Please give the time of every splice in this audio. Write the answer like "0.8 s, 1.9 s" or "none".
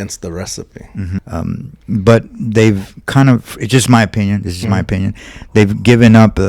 1.2 s